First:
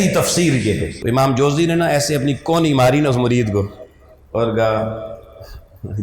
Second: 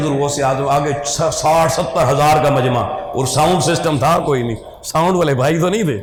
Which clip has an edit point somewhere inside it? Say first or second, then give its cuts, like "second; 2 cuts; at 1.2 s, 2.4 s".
first; 1 cut; at 0.9 s